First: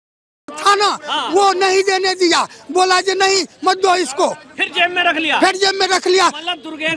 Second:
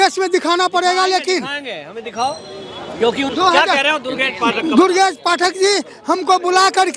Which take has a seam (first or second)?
second